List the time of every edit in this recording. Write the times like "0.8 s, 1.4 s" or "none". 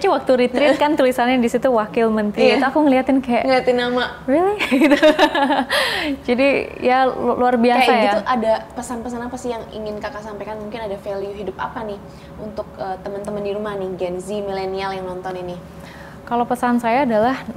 none